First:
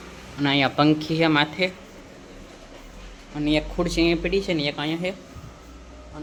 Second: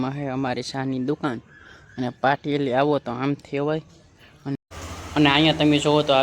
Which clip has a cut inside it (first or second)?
second